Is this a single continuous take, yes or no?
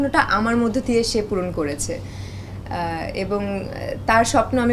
yes